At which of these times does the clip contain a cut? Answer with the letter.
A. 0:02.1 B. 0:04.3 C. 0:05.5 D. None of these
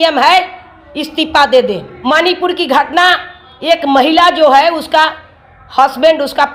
A